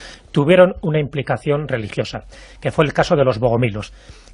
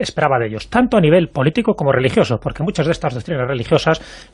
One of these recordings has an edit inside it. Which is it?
first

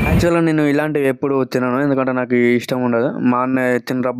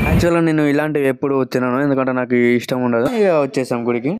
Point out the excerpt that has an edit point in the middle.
second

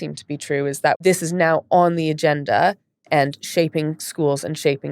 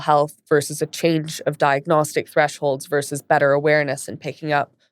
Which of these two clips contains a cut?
first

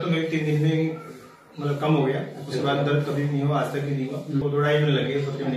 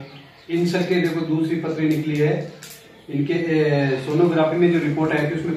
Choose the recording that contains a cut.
first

